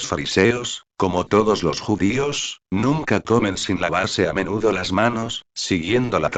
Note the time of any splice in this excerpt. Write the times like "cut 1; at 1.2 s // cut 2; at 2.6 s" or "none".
none